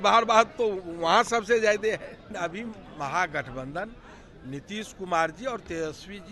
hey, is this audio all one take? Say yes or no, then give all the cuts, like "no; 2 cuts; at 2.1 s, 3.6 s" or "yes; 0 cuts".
no; 1 cut; at 2.3 s